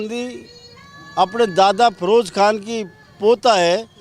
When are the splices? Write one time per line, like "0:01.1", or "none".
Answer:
none